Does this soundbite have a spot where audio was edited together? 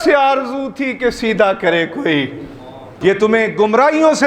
yes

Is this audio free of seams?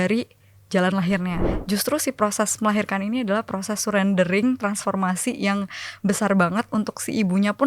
no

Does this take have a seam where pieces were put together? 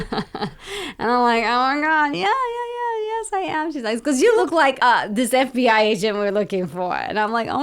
yes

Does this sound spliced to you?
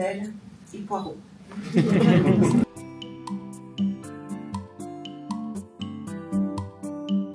no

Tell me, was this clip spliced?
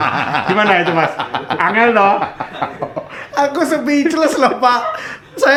no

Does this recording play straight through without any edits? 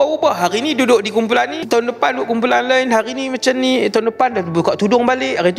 no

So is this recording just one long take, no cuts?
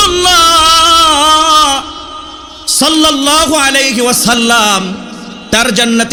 yes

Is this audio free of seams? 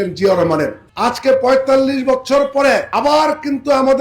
no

